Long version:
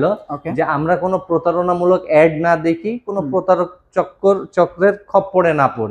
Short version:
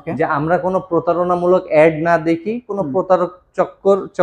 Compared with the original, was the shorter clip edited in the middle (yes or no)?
no